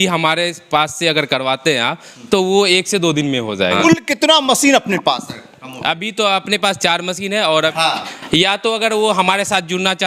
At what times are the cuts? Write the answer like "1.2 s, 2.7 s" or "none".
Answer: 3.8 s, 7.7 s